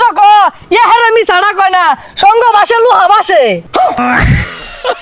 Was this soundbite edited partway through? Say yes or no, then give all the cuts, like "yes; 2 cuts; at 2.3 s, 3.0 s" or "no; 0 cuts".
yes; 1 cut; at 4.0 s